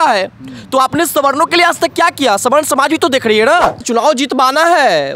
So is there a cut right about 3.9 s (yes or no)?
yes